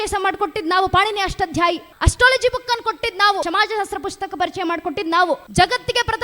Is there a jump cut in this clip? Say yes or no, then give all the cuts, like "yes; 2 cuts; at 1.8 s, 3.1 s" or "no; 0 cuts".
yes; 3 cuts; at 1.9 s, 3.5 s, 5.5 s